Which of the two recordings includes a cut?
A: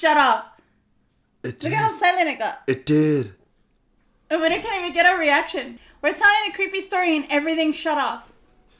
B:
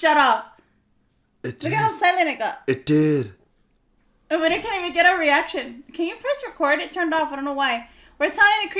A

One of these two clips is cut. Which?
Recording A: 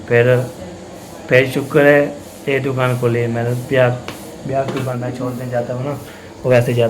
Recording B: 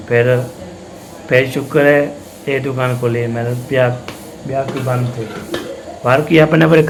A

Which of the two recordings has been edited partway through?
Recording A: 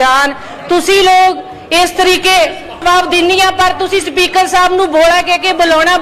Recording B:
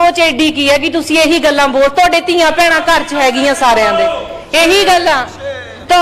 A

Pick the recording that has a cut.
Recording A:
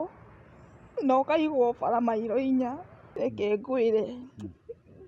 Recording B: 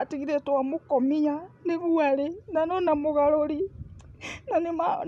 A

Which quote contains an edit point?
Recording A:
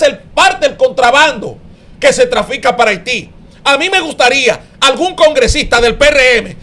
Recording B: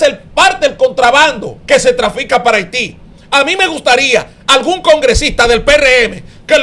B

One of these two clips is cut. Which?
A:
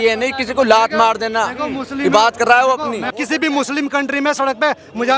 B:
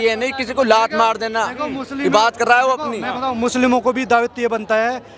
A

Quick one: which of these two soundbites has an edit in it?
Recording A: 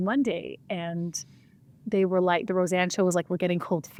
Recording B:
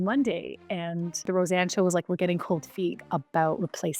B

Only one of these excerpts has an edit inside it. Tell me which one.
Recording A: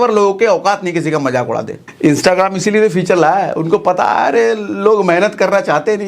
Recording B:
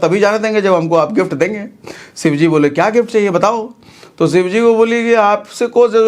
A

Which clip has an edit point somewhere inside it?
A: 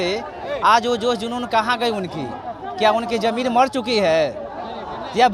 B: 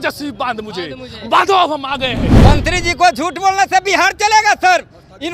B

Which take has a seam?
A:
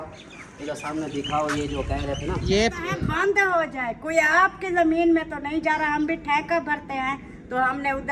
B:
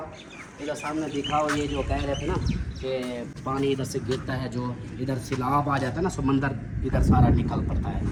A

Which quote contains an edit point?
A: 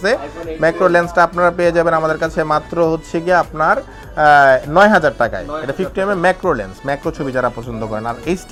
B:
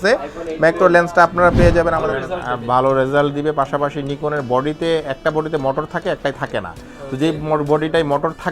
B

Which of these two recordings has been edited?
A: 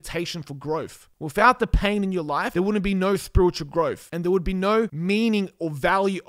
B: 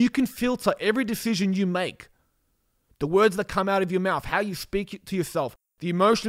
A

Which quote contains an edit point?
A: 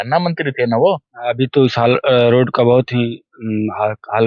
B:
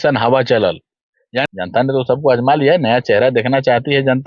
B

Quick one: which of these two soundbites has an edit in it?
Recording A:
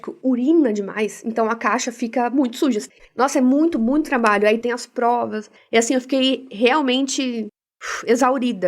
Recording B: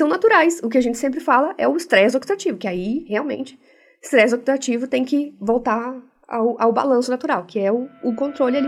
A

